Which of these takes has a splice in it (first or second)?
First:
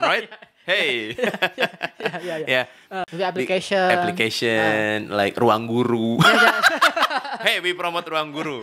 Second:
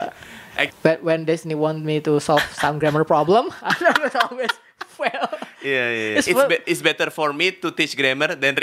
first